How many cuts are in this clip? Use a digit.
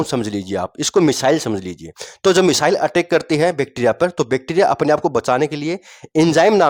0